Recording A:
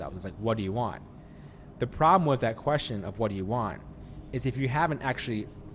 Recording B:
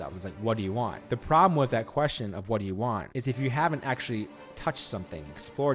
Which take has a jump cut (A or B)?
B